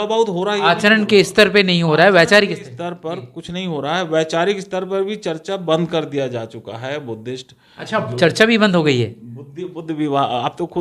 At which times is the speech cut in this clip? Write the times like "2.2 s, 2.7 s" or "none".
none